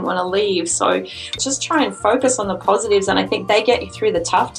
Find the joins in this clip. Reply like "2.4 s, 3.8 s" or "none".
1.3 s